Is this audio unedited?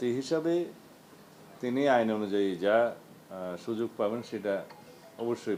yes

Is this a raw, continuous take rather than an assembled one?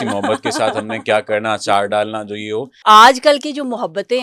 no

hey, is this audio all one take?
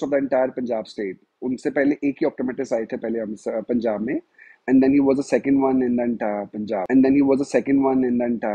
yes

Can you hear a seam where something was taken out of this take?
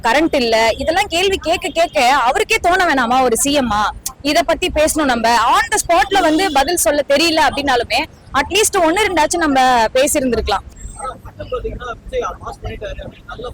yes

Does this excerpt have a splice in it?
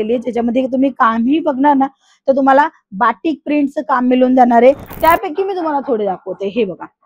yes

